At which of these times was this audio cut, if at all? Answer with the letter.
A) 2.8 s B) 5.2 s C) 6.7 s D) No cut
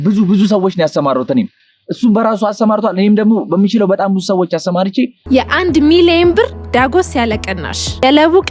B